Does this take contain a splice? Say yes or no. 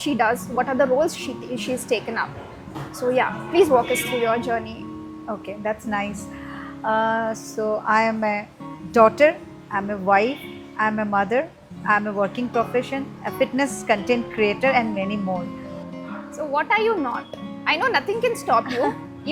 no